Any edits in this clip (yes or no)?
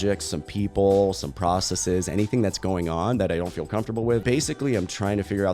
yes